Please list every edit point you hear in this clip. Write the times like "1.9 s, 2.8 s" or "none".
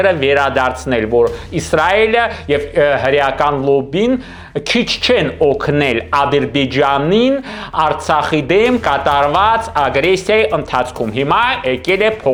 none